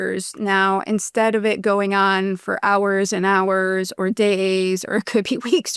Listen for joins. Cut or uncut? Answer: uncut